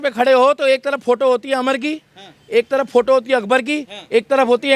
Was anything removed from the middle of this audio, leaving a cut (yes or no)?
no